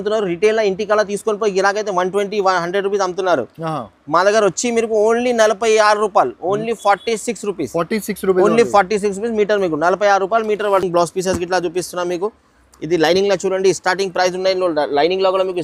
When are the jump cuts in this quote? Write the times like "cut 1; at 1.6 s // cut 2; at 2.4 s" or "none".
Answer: none